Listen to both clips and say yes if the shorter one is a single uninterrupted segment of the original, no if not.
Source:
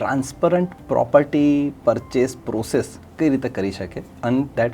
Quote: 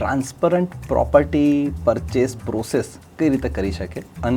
yes